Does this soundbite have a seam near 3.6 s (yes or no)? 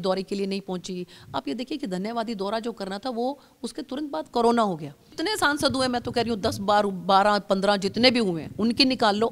no